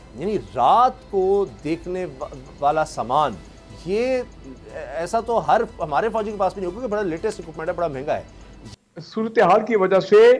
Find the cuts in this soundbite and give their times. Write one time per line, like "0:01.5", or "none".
0:08.7